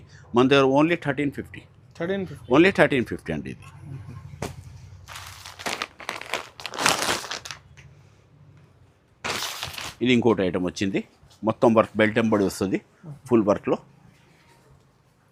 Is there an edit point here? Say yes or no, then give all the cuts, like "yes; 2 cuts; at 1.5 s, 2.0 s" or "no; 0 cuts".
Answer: no; 0 cuts